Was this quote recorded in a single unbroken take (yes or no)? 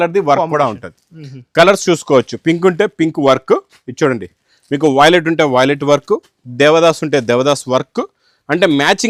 yes